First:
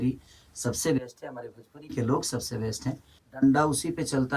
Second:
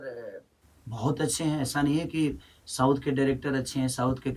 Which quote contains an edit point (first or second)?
first